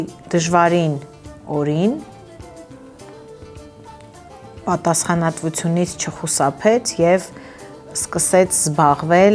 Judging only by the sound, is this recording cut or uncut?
uncut